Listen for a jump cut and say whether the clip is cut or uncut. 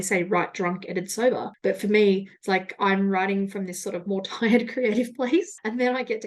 uncut